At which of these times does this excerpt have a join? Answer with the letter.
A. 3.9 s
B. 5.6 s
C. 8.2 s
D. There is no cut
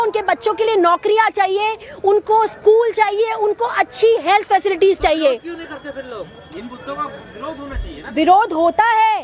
D